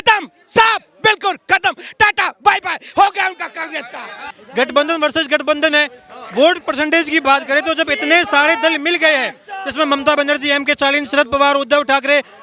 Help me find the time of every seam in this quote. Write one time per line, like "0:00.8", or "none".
0:04.4